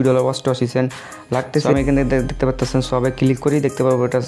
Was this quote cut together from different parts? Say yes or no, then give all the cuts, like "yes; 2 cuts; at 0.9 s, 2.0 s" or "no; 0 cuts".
yes; 1 cut; at 1.7 s